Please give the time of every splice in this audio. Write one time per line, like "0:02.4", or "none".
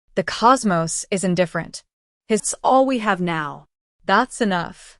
0:02.5